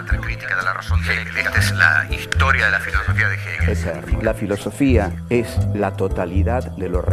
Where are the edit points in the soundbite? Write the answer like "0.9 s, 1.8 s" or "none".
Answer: 2.4 s